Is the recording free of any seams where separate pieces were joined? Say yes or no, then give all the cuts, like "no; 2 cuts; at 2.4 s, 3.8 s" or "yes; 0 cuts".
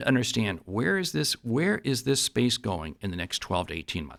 yes; 0 cuts